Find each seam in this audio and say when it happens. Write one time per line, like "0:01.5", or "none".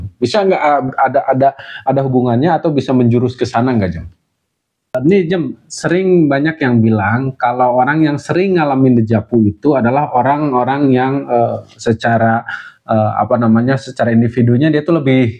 0:04.7